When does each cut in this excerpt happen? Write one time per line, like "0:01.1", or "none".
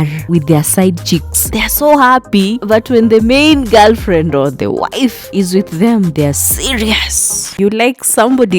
0:07.6